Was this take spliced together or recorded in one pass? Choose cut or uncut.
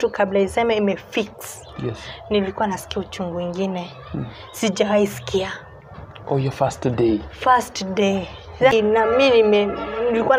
cut